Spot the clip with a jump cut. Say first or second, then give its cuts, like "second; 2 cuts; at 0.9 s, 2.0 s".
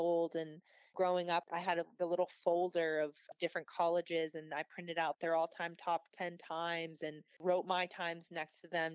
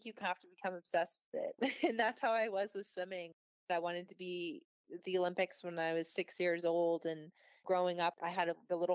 second; 1 cut; at 3.7 s